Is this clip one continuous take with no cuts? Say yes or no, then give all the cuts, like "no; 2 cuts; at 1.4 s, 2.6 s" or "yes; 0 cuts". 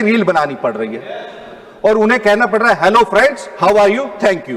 yes; 0 cuts